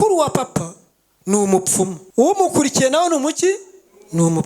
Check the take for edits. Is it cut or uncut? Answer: cut